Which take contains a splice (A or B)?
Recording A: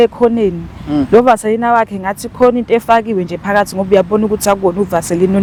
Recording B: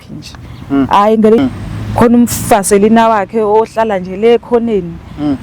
B